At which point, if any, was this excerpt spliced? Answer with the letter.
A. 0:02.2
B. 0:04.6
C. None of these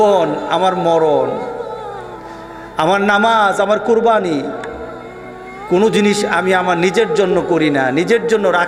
C